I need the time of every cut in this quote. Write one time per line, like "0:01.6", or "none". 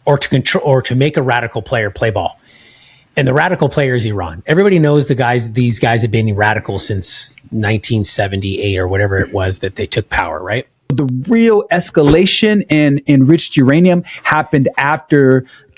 0:10.9